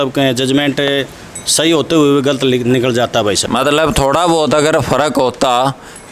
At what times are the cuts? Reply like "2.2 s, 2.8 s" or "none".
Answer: 3.4 s

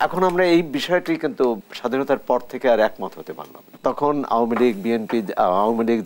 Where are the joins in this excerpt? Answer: 1.7 s, 3.7 s

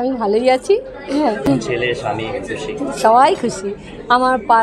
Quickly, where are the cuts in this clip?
1.5 s

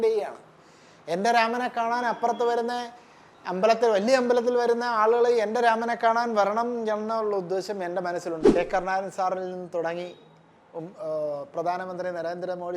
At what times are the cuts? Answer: 8.5 s

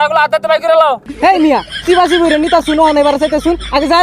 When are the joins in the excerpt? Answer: 1.1 s

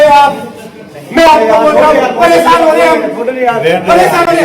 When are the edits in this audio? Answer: none

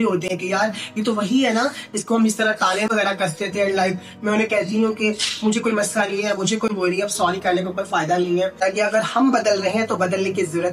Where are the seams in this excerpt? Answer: 8.6 s

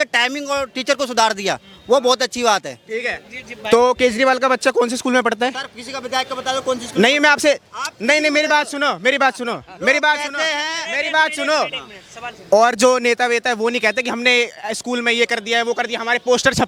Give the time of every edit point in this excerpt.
none

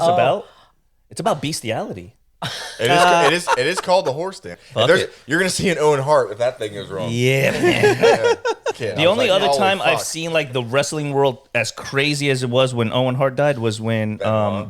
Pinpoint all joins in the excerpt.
4.5 s, 8.7 s

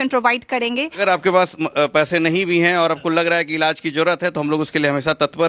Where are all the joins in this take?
1.0 s

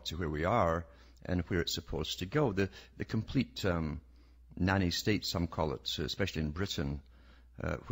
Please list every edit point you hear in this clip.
none

